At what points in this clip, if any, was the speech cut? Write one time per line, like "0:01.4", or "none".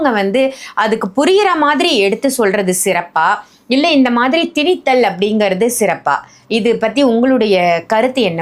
none